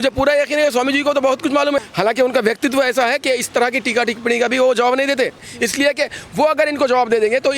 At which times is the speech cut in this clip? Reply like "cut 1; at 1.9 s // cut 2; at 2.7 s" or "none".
cut 1; at 1.8 s // cut 2; at 5.5 s